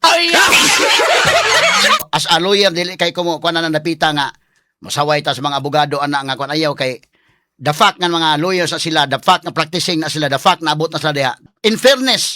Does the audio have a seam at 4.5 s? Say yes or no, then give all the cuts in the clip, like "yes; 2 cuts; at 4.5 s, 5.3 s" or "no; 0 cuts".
no; 2 cuts; at 2.1 s, 11.4 s